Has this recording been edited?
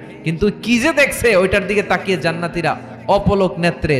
no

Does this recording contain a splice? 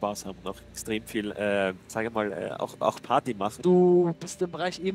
yes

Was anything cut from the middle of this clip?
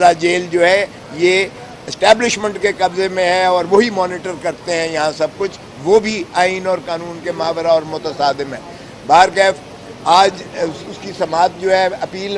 no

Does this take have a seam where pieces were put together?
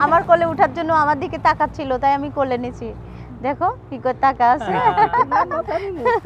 no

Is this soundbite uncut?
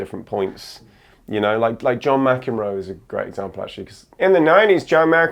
no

